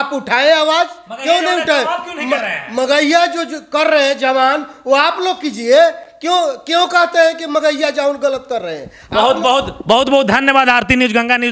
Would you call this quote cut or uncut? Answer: uncut